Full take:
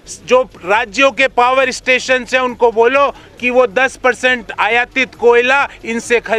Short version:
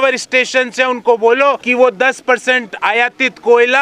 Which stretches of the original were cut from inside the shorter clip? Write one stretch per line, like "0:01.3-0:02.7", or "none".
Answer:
0:03.2-0:03.4